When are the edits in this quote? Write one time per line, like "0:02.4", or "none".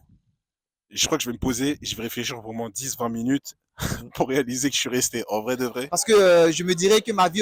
0:05.8